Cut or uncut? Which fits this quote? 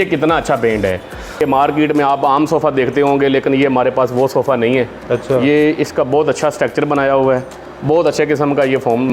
cut